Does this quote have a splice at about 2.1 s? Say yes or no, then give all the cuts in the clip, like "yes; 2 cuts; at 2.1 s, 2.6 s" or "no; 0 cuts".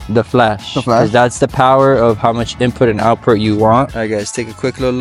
no; 1 cut; at 3.9 s